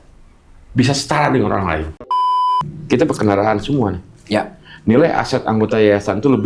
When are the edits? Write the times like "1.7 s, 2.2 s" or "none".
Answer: 2.4 s